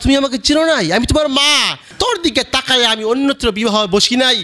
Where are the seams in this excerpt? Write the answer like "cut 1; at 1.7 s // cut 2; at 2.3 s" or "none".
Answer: cut 1; at 1.8 s